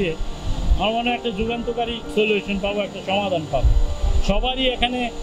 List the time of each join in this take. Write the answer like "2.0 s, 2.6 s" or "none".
2.0 s